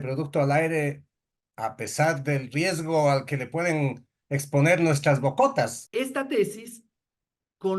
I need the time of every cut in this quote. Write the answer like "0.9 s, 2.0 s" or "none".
5.8 s